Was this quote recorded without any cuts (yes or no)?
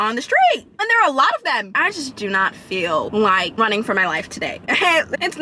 no